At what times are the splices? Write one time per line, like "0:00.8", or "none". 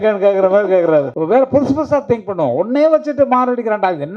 0:01.1